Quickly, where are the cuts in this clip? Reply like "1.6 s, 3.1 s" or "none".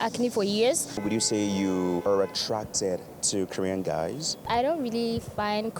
1.0 s, 2.0 s, 4.4 s